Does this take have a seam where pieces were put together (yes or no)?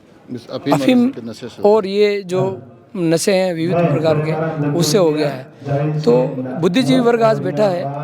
no